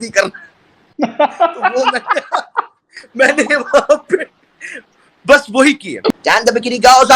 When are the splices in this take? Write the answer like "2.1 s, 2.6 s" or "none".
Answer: 6.2 s

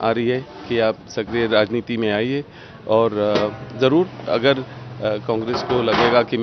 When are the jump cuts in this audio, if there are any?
none

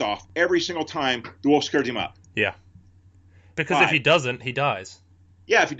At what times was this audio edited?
3.4 s

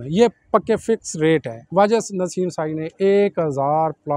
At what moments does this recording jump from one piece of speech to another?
1.6 s

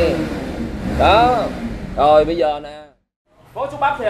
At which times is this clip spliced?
2.7 s

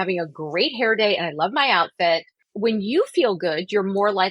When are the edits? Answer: 2.4 s

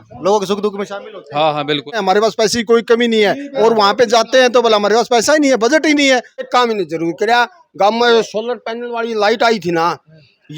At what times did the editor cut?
1.9 s, 6.4 s

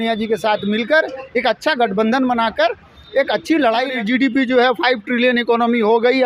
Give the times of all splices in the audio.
3.9 s

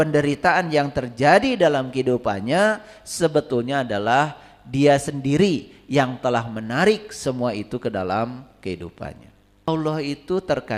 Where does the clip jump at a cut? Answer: 9.7 s

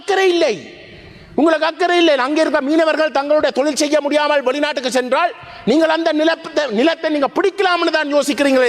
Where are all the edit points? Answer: none

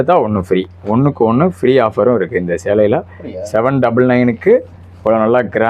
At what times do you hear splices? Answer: none

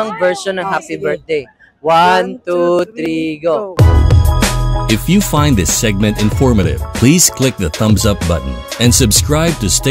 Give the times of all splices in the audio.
3.7 s

